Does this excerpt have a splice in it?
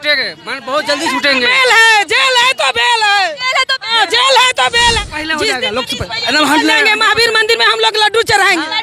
yes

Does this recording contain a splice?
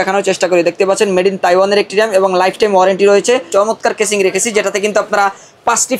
yes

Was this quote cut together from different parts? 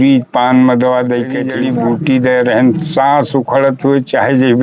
yes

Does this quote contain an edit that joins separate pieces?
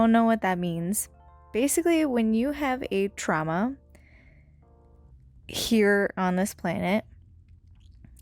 no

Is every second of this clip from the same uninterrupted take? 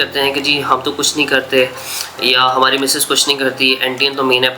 yes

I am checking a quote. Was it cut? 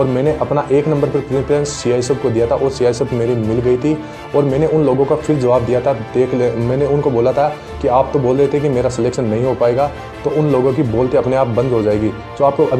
no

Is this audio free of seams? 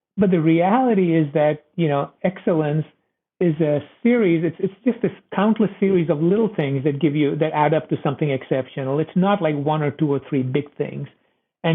no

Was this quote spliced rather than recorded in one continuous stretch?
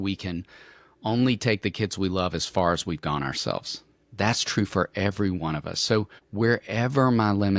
yes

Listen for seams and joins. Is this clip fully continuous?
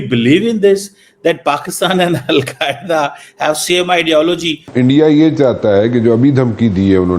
no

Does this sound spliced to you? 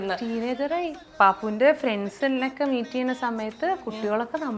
yes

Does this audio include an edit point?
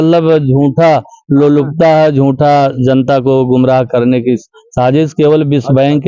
no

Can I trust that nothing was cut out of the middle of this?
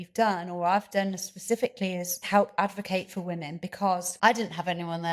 no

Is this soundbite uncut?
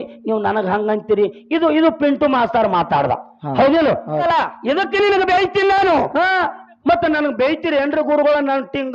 no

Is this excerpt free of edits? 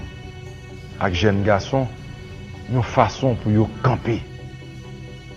yes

